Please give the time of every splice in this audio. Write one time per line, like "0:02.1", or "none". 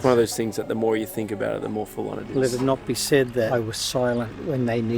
0:02.3
0:03.5